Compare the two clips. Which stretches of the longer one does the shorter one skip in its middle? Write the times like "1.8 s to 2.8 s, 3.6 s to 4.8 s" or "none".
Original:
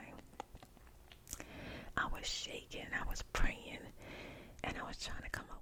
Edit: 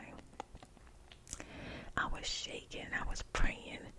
none